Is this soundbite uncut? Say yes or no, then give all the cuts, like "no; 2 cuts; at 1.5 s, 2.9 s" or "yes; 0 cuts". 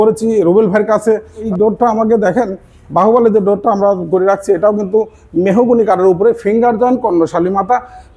no; 1 cut; at 1.5 s